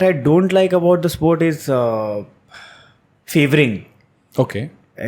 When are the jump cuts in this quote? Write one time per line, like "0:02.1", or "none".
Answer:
none